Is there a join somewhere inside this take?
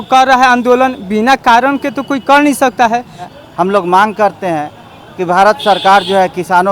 yes; 1 cut; at 3.2 s

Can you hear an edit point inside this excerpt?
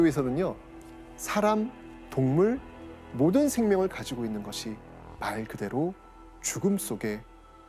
no; 0 cuts

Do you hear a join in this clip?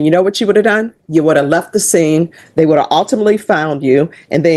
no; 0 cuts

